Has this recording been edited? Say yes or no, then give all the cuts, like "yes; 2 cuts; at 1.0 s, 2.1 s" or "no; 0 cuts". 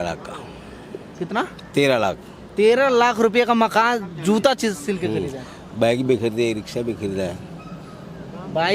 no; 0 cuts